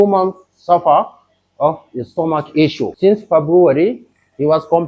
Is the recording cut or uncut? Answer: cut